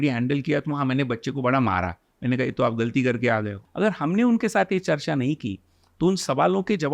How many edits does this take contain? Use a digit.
1